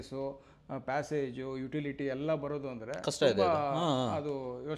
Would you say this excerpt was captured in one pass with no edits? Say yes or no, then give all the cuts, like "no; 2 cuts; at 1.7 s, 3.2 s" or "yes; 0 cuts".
yes; 0 cuts